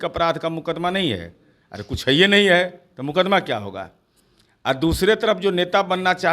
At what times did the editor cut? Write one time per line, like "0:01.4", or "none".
none